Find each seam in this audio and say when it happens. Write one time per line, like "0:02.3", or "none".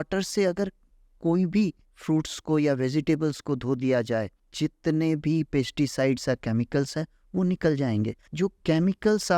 0:01.9
0:04.4
0:08.2